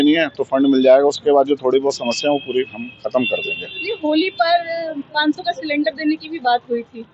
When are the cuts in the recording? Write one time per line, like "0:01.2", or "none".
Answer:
none